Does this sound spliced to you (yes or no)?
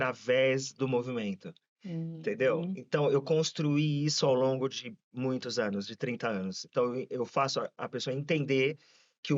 no